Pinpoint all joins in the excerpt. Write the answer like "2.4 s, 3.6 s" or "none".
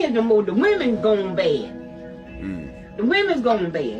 none

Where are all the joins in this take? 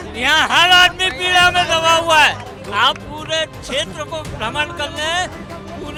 none

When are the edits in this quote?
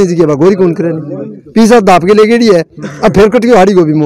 none

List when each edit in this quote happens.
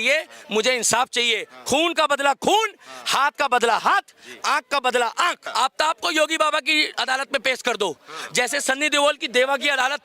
5.4 s

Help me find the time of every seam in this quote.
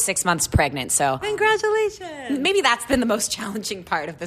1.2 s, 2.8 s

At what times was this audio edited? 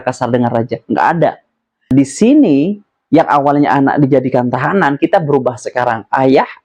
1.9 s

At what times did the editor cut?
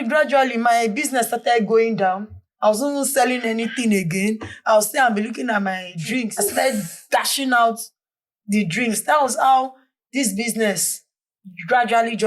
6.3 s

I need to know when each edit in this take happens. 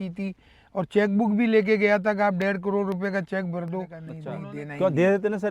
4.1 s

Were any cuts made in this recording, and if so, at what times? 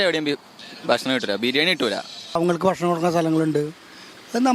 2.4 s

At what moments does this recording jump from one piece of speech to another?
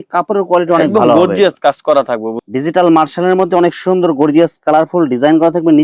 2.4 s

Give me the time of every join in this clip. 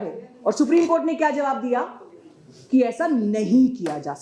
none

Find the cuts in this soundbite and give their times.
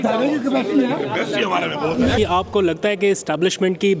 2.2 s

